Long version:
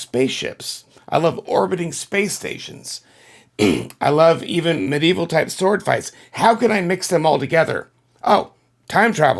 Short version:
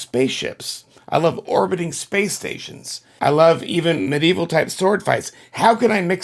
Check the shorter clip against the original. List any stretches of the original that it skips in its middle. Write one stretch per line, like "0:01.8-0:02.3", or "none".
0:03.1-0:03.9